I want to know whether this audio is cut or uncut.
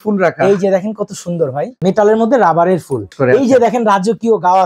cut